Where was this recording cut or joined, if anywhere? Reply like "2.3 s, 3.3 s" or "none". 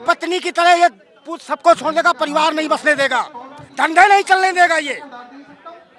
none